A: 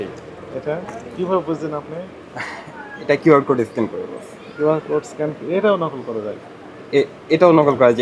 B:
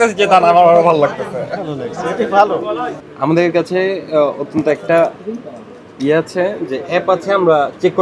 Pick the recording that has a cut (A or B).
B